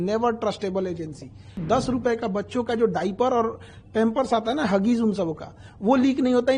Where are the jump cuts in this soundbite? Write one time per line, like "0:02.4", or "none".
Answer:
0:01.6